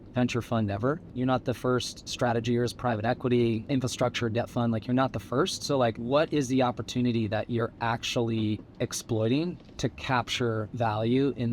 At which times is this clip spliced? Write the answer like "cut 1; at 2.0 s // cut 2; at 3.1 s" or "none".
cut 1; at 1.1 s // cut 2; at 2.0 s // cut 3; at 3.6 s // cut 4; at 6.0 s